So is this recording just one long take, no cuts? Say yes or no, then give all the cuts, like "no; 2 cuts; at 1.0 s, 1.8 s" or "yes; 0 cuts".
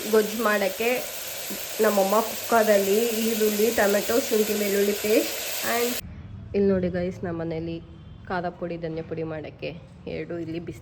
no; 1 cut; at 5.9 s